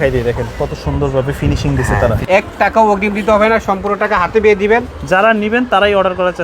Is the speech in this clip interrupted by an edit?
yes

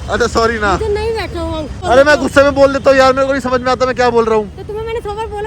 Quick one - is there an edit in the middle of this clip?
yes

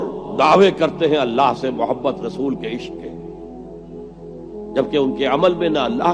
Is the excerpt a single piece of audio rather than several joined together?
no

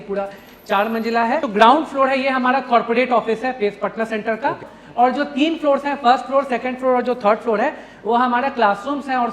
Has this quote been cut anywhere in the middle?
yes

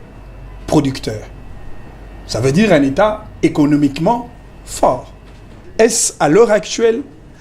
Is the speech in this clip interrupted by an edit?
yes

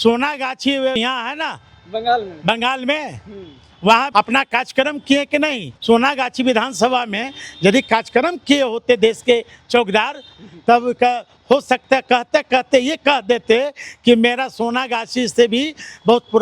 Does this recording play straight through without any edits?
no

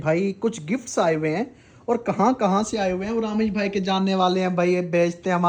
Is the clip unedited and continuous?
yes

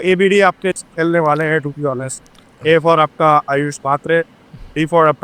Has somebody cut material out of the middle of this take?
no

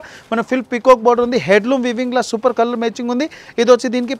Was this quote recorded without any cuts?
yes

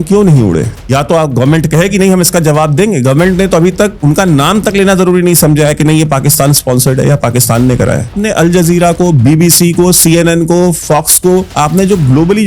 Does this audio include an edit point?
yes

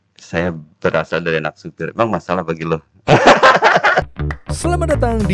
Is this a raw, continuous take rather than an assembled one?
no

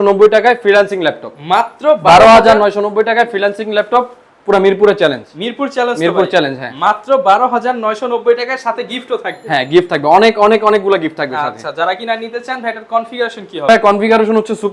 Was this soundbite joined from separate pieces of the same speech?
no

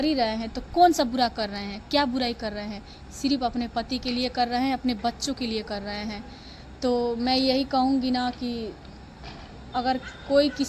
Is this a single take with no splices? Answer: yes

